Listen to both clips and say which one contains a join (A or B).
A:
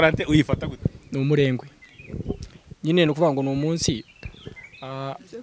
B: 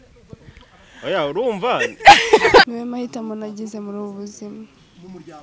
B